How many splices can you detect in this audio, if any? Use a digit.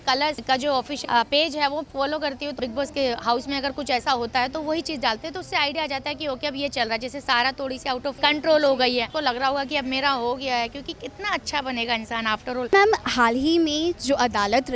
5